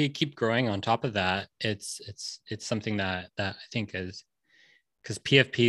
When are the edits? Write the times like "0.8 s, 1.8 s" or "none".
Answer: none